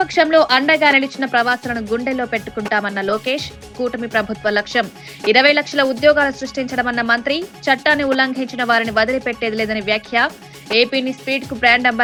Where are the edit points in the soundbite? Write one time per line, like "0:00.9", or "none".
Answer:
none